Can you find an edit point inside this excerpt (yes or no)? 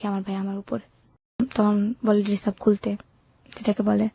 yes